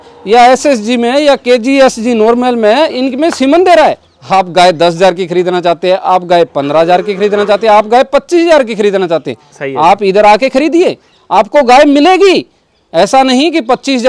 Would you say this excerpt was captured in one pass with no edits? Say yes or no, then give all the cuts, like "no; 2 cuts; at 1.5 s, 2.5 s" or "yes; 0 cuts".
no; 1 cut; at 4.1 s